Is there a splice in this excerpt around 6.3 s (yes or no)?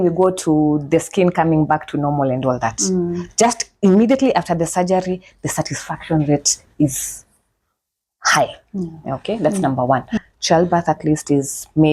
no